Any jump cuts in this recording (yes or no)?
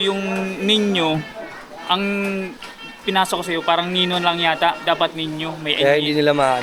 no